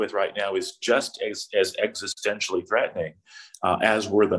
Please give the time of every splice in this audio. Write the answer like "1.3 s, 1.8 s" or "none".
none